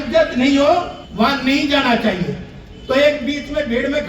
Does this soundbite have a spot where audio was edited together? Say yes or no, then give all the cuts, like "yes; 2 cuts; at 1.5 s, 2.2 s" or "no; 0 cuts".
yes; 1 cut; at 1.0 s